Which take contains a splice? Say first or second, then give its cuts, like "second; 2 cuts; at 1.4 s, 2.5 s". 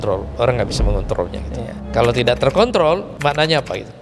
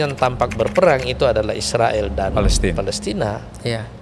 first; 2 cuts; at 1.7 s, 3.1 s